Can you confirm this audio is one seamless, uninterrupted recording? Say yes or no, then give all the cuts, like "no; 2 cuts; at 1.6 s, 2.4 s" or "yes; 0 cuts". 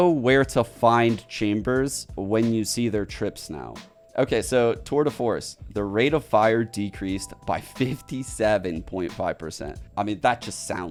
yes; 0 cuts